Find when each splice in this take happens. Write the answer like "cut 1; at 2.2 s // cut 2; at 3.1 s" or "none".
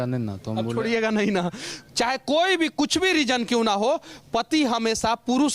cut 1; at 1.7 s

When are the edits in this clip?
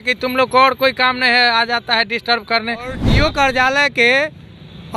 cut 1; at 3.1 s

